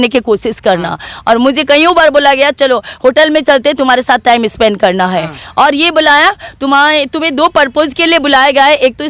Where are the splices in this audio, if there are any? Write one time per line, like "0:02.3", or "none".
none